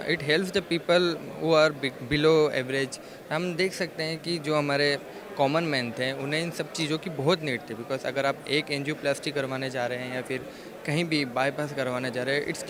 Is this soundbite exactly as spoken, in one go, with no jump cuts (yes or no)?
yes